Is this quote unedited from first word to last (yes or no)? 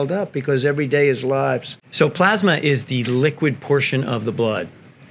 no